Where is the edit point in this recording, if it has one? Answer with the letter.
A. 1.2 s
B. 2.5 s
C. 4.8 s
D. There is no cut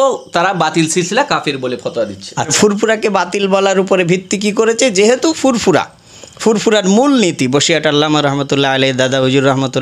B